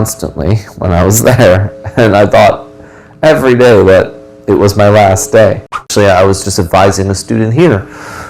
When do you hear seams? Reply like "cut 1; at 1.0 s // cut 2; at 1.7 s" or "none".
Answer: cut 1; at 5.9 s